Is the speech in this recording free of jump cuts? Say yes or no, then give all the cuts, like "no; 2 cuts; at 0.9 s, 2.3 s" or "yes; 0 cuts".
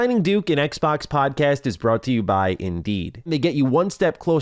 no; 1 cut; at 3.3 s